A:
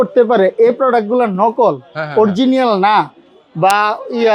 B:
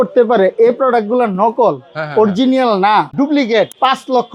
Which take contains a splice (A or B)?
B